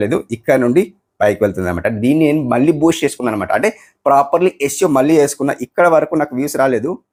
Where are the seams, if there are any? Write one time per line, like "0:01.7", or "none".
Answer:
none